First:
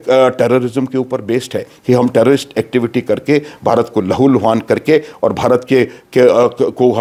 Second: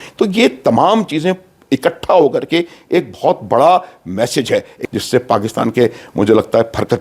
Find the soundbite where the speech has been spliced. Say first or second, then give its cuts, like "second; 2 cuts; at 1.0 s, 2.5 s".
second; 1 cut; at 4.9 s